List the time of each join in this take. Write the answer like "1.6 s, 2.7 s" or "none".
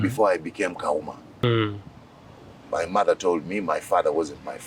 1.4 s